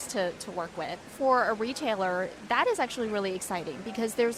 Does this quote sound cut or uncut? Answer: cut